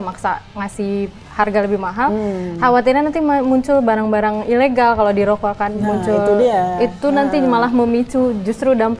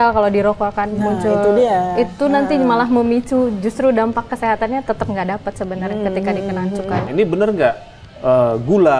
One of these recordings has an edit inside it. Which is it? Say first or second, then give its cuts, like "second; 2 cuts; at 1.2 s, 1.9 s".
second; 1 cut; at 7.1 s